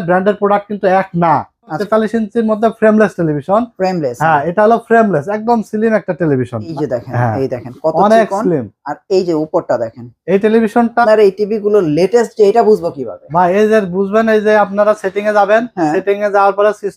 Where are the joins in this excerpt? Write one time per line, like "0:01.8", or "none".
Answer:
0:01.8
0:06.7
0:11.0